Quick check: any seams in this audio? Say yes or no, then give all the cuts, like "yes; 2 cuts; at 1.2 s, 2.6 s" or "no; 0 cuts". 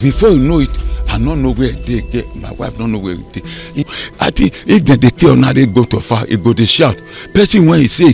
yes; 1 cut; at 3.9 s